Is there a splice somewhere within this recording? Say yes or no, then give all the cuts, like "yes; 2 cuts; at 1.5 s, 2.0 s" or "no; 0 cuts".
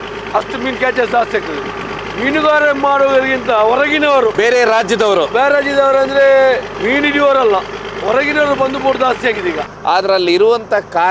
yes; 3 cuts; at 4.3 s, 6.7 s, 9.7 s